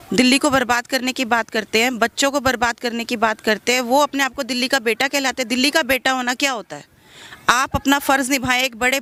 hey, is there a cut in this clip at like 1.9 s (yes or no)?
no